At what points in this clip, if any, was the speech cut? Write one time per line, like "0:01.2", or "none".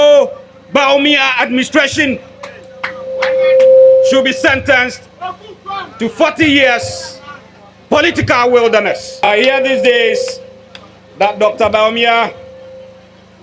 0:09.3